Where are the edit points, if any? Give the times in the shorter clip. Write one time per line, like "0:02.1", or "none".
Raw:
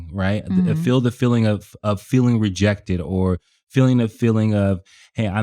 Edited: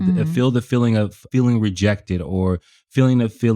0:01.2